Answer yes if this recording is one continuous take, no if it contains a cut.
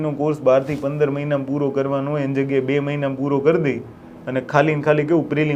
yes